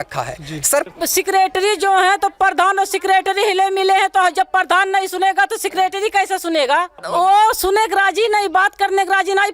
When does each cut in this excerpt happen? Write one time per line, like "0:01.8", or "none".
0:00.9
0:07.0